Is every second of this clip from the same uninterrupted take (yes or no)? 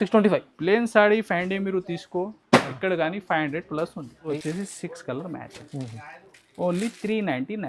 no